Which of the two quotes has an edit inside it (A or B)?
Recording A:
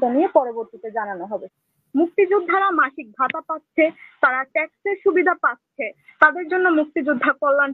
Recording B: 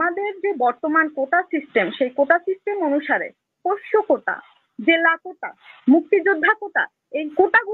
A